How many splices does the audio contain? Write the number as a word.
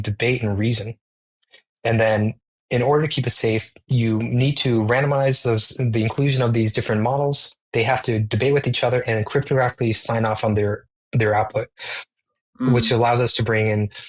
zero